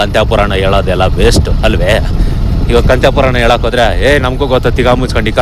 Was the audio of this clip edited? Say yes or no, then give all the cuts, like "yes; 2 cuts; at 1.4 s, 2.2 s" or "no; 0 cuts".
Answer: no; 0 cuts